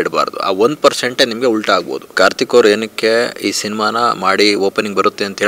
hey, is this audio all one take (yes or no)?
no